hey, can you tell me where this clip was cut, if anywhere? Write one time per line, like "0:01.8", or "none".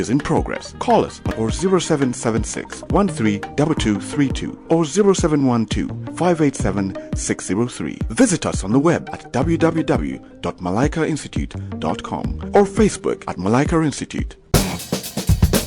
0:14.4